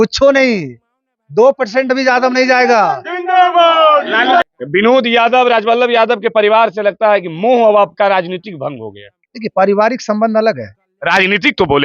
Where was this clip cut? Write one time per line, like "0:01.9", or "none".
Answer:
0:04.4